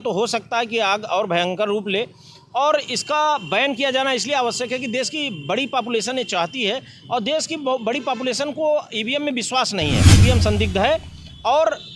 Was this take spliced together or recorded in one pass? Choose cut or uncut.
cut